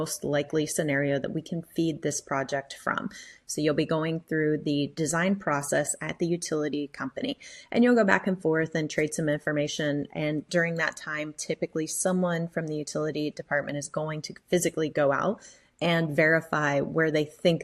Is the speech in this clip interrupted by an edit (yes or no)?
no